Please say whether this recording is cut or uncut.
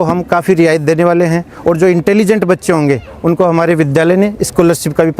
uncut